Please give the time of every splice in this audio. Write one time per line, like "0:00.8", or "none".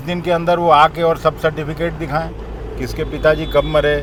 none

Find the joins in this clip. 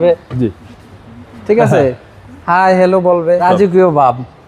0:03.4

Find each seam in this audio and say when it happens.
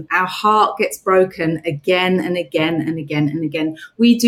none

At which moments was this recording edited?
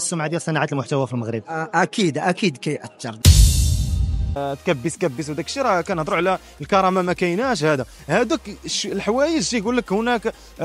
0:04.4

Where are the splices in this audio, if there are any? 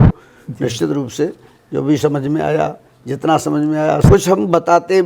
0:04.0

